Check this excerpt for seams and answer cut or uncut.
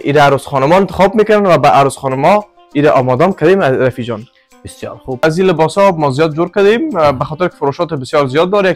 cut